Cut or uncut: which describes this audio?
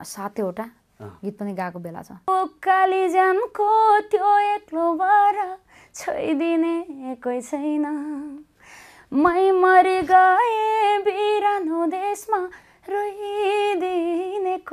cut